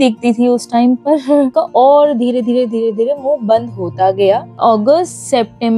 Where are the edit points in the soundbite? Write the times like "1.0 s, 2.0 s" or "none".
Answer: 1.5 s, 4.5 s